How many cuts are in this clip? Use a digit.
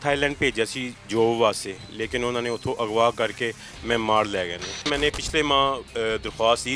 1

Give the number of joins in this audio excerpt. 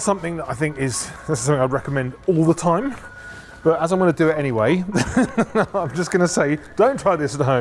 0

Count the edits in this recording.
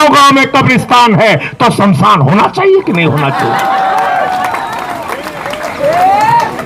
0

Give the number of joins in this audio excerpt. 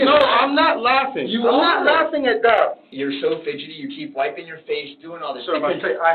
1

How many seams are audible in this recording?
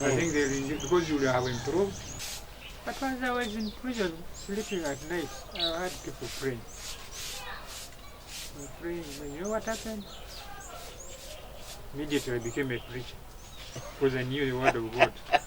1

